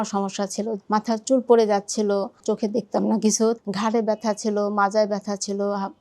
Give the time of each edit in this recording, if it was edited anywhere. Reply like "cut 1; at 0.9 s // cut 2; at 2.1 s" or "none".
cut 1; at 0.8 s // cut 2; at 2.4 s // cut 3; at 3.6 s